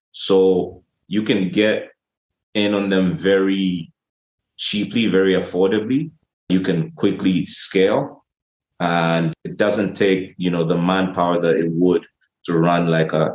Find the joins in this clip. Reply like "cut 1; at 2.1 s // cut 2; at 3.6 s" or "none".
cut 1; at 6.5 s // cut 2; at 9.4 s